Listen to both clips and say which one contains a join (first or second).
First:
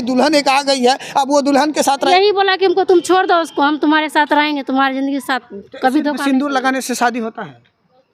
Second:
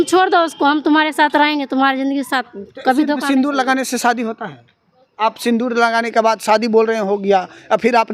first